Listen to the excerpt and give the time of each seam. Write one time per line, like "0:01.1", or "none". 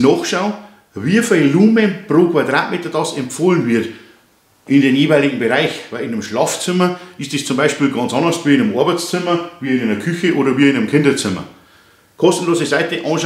none